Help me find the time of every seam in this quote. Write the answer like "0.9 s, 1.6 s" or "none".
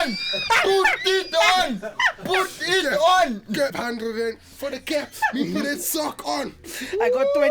3.7 s